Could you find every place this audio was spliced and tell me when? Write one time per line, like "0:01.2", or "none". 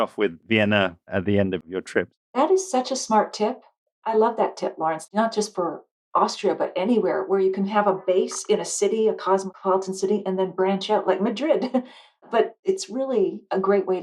0:02.1
0:05.0